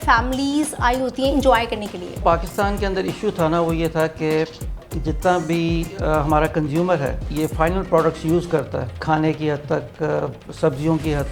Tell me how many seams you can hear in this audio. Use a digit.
3